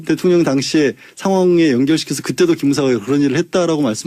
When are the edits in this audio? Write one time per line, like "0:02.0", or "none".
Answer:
none